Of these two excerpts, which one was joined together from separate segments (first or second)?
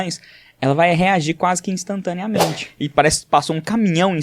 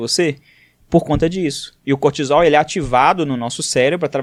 first